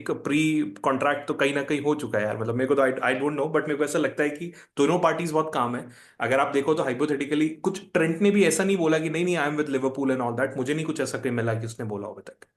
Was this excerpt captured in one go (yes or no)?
yes